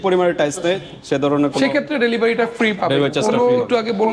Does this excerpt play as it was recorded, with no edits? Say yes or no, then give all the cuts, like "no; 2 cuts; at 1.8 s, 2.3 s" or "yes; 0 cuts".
yes; 0 cuts